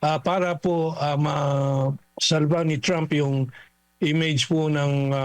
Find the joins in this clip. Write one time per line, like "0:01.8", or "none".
0:02.0